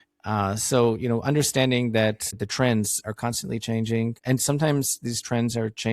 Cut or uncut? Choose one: cut